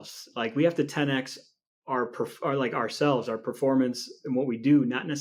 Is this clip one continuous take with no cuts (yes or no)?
yes